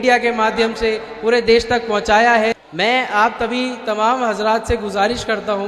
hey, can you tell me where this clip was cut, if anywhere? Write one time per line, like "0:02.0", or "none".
0:02.6